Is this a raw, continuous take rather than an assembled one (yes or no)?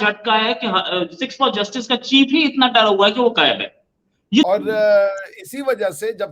no